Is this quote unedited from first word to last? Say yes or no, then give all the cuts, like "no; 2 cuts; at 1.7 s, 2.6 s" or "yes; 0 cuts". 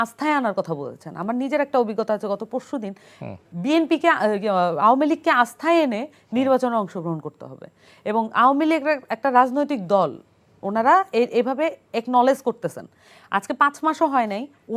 yes; 0 cuts